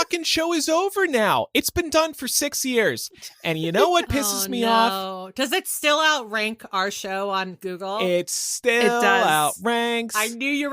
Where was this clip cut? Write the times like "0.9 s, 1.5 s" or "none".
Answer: none